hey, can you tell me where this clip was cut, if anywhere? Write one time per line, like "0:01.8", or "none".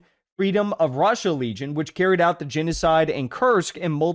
none